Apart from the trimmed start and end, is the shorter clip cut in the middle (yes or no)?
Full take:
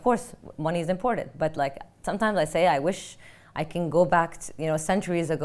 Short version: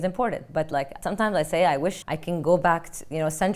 yes